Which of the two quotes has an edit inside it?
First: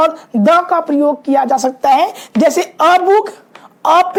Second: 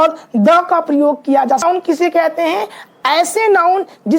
second; 1 cut; at 1.6 s

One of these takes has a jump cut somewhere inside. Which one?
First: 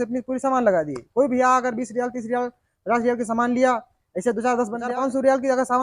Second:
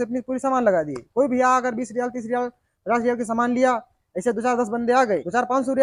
first; 1 cut; at 4.8 s

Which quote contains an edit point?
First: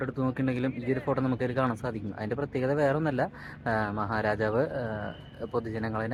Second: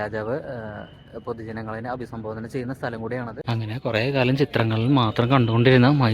second; 1 cut; at 3.4 s

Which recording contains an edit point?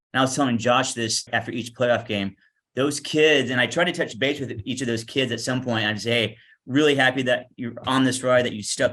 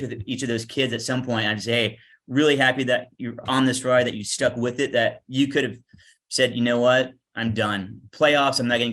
first; 1 cut; at 1.3 s

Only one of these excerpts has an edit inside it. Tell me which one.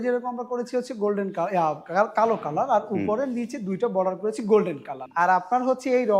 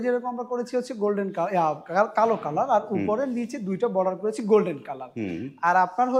first; 1 cut; at 5.0 s

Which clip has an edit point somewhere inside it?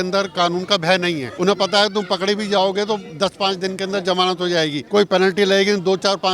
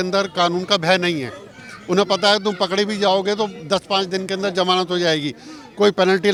first; 2 cuts; at 1.3 s, 4.8 s

